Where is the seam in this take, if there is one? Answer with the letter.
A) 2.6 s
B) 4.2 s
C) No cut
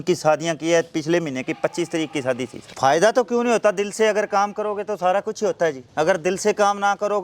A